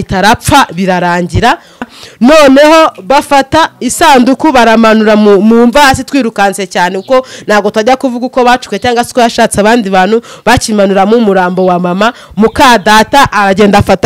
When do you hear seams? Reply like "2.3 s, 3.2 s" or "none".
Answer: 1.9 s